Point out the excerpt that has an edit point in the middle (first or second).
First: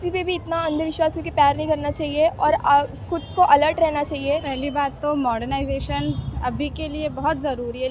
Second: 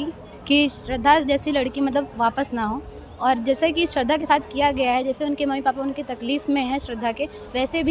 first